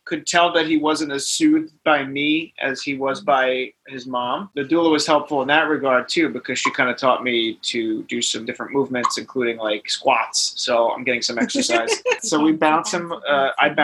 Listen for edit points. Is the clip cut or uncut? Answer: cut